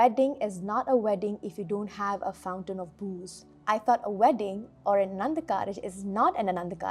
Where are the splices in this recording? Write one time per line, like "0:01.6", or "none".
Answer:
0:03.5